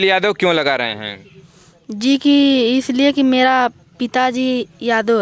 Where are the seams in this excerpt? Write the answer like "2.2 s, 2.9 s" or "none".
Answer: none